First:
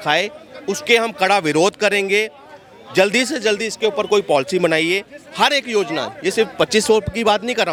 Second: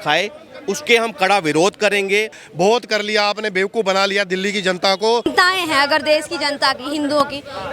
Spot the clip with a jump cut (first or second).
second